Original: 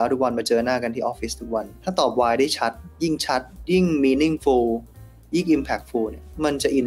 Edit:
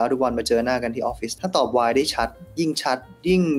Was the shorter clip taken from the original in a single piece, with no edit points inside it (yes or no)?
no